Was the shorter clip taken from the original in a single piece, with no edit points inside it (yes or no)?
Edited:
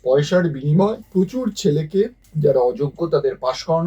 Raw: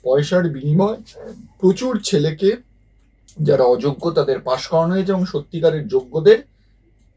no